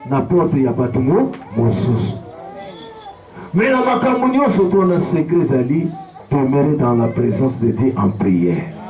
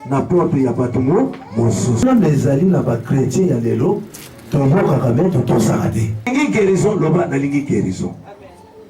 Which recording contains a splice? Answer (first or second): second